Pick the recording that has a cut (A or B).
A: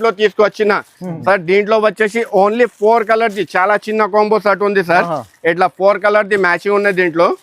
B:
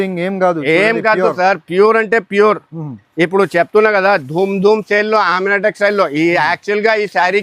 A